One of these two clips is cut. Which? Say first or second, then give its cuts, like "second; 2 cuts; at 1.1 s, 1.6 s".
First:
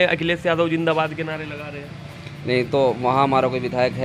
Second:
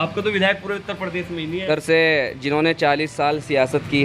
second; 1 cut; at 1.7 s